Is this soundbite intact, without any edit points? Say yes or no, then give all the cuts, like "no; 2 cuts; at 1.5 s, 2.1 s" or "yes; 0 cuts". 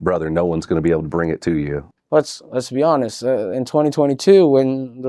no; 1 cut; at 1.8 s